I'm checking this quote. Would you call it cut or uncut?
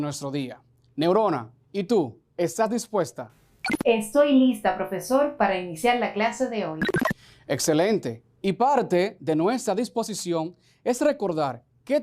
cut